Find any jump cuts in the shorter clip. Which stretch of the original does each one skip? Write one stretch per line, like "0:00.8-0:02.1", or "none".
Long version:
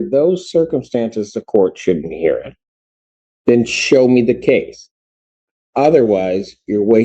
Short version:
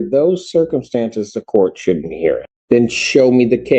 0:02.5-0:03.3